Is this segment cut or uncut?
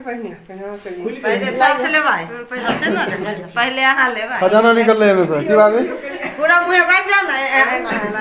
uncut